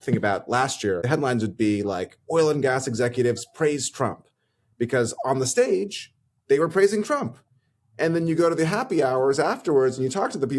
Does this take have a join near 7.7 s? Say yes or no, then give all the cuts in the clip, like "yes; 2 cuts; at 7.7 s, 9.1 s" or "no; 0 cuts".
no; 1 cut; at 1.0 s